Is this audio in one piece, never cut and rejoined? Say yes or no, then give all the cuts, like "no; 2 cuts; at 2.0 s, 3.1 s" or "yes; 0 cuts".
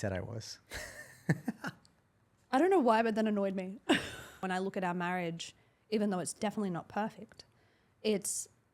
no; 1 cut; at 4.4 s